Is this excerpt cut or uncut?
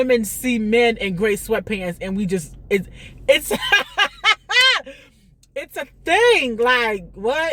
uncut